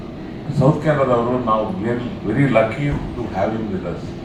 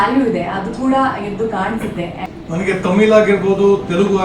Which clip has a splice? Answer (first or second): second